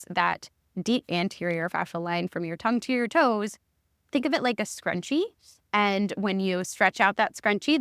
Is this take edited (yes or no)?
yes